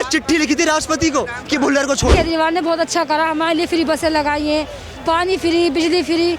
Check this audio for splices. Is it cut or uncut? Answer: cut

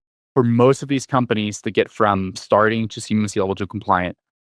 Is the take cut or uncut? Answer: uncut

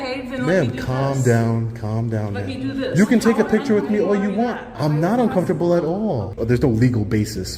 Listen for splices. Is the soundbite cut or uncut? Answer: cut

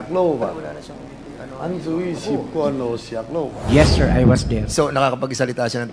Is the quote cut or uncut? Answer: cut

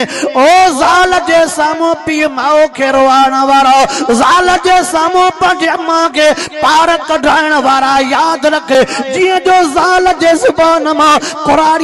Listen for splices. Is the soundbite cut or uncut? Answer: cut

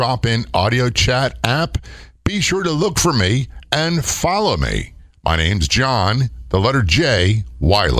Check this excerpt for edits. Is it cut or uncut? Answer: uncut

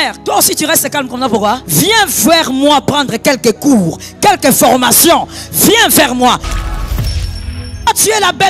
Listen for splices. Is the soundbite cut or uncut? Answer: cut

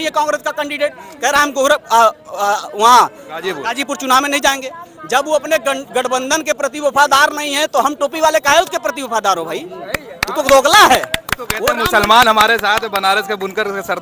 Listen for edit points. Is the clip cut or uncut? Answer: uncut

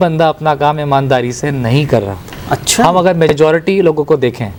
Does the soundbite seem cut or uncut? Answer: uncut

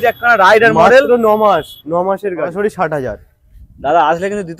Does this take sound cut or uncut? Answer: cut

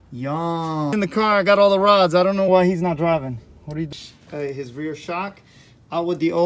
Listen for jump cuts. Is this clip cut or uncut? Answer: cut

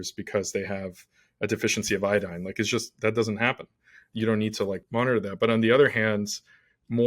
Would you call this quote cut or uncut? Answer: cut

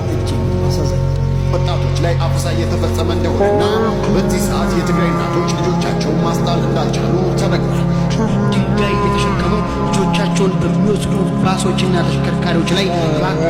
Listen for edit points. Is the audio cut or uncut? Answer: uncut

